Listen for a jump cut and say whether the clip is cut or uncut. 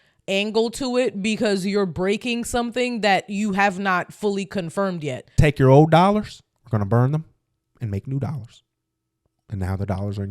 cut